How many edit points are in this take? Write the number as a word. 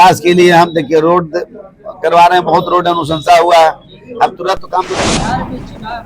one